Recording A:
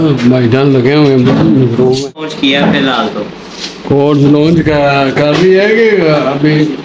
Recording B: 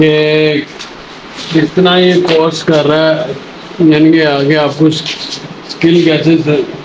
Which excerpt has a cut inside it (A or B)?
A